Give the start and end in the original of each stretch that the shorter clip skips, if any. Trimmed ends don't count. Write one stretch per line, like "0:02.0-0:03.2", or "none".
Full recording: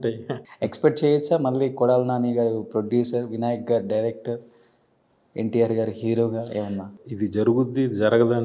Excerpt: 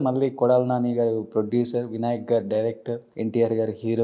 0:04.5-0:05.3